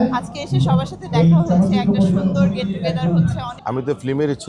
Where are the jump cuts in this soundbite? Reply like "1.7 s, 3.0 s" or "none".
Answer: 3.5 s